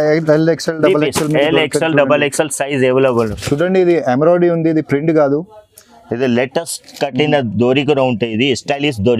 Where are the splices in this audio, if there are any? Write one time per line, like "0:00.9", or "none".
0:03.3